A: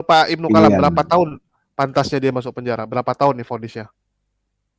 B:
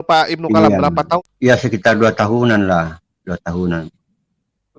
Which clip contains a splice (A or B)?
B